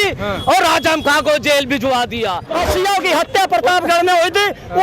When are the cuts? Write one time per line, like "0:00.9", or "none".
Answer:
0:02.5